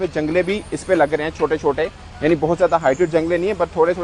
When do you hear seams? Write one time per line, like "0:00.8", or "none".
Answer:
none